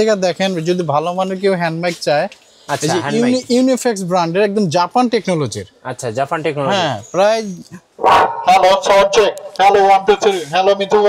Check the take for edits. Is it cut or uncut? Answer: uncut